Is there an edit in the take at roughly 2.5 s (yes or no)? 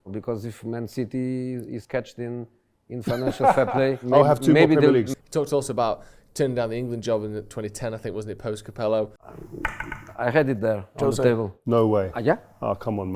no